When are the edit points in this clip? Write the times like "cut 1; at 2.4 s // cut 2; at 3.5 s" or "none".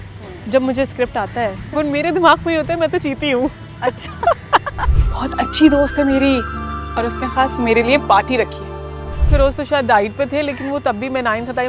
cut 1; at 1.6 s // cut 2; at 4.8 s // cut 3; at 8.9 s